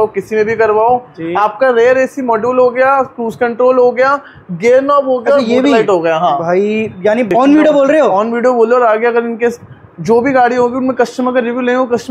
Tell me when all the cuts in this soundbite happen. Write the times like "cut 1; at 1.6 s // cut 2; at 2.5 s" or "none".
cut 1; at 7.3 s